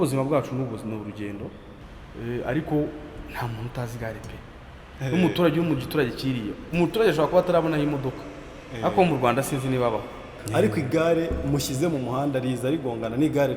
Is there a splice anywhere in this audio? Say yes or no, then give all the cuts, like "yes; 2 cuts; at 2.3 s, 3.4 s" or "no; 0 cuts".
yes; 2 cuts; at 1.7 s, 10.3 s